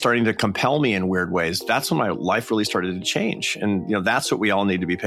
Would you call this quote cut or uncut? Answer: uncut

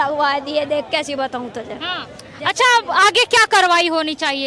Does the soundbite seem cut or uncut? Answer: uncut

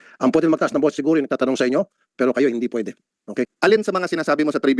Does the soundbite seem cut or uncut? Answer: cut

